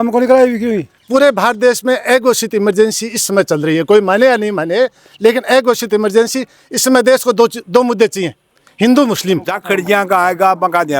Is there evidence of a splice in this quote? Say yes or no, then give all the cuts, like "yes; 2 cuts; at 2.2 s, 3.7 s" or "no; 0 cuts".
yes; 2 cuts; at 0.9 s, 9.6 s